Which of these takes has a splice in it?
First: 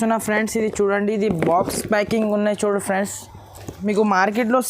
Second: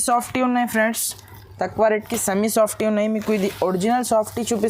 first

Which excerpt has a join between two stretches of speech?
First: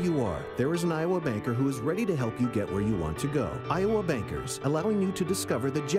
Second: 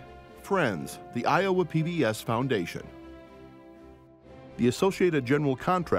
second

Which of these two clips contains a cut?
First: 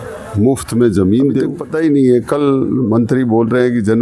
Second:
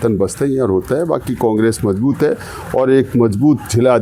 first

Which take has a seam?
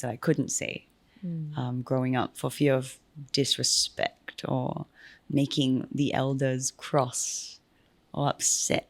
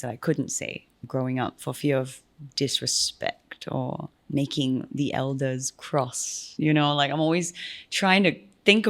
second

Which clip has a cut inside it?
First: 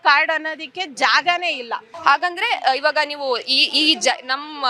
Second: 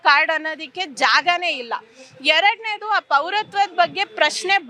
first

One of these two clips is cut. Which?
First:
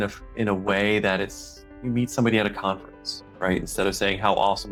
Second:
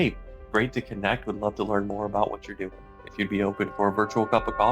second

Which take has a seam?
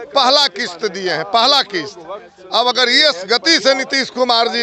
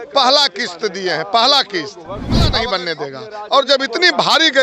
second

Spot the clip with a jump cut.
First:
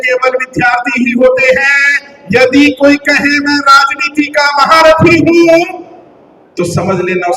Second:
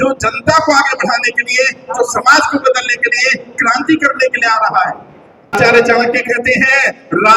second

